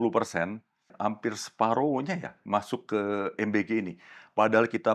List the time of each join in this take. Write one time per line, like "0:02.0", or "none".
0:00.9